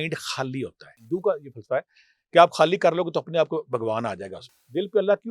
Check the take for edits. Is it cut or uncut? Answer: cut